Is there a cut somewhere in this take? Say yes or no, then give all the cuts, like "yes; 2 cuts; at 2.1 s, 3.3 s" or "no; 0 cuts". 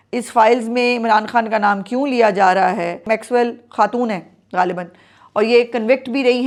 no; 0 cuts